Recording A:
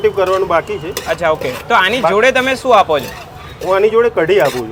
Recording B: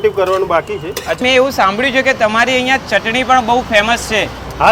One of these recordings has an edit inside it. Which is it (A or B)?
B